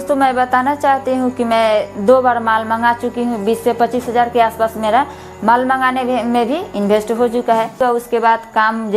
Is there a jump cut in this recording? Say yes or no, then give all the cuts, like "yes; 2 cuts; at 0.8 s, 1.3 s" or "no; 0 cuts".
yes; 1 cut; at 7.8 s